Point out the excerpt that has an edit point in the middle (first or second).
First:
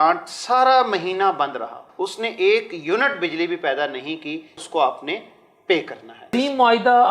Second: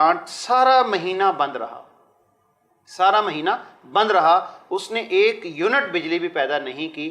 first